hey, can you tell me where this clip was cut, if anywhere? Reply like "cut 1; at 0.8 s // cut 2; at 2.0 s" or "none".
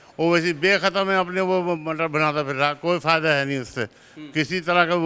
none